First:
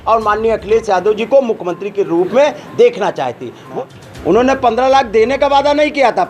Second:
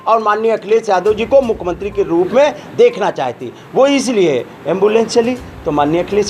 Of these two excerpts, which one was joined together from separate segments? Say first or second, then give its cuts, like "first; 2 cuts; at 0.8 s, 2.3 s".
first; 1 cut; at 3.6 s